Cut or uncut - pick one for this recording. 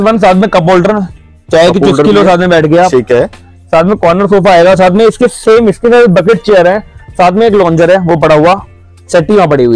uncut